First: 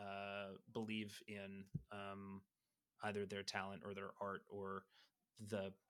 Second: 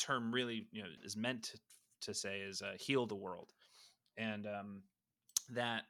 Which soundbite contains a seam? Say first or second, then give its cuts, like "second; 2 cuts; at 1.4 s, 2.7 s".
second; 1 cut; at 0.9 s